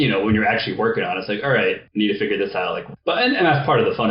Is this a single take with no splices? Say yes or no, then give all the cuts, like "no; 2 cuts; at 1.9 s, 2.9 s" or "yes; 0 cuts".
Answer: no; 2 cuts; at 1.8 s, 2.8 s